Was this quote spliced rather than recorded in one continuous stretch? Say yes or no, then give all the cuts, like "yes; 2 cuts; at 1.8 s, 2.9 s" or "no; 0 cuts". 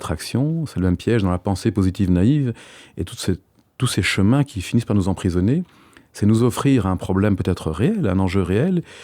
no; 0 cuts